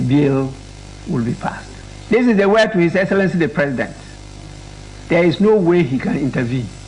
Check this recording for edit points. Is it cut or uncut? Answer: cut